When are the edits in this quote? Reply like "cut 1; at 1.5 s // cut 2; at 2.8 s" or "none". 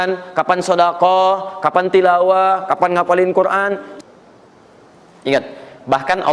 cut 1; at 3.9 s